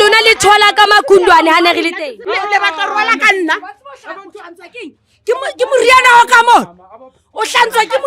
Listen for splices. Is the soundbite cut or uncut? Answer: cut